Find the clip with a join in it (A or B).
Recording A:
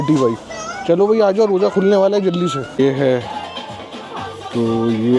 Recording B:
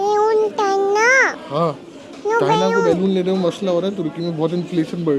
A